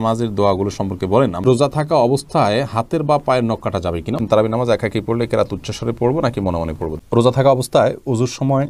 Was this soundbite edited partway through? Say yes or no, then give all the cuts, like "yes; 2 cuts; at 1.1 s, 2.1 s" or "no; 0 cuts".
yes; 3 cuts; at 1.4 s, 4.2 s, 6.9 s